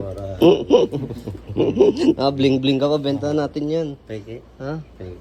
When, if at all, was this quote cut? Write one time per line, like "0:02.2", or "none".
none